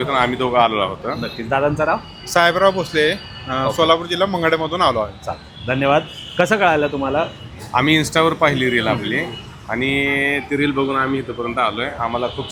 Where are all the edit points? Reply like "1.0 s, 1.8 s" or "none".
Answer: none

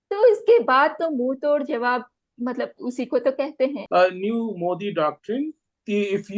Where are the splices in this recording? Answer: 3.8 s

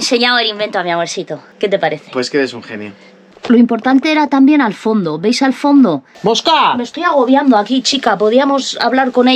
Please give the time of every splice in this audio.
3.4 s, 6.1 s

